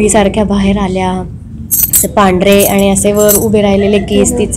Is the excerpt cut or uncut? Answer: uncut